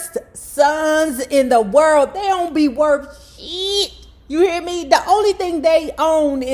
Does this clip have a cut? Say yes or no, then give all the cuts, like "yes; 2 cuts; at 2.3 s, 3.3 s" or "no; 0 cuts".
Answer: no; 0 cuts